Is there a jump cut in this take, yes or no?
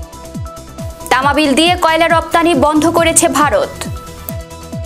yes